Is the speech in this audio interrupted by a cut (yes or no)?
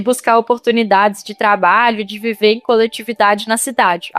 no